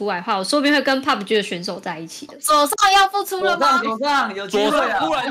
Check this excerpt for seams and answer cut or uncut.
cut